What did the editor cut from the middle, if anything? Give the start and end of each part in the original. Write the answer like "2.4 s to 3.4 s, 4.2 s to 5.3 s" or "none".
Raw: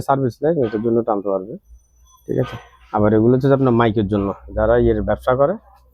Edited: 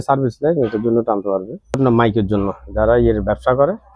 1.8 s to 3.6 s